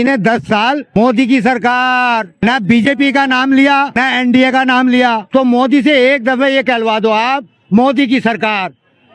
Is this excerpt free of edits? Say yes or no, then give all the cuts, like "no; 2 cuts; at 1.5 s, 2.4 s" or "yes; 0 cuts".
no; 4 cuts; at 1.0 s, 2.3 s, 4.0 s, 5.2 s